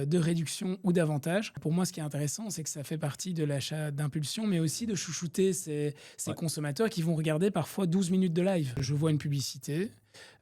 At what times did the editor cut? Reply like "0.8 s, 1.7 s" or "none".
1.6 s, 8.8 s